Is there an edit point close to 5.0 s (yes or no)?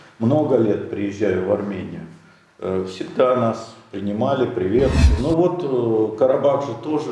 yes